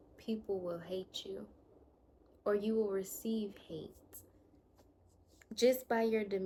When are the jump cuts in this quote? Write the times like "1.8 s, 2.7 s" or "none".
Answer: none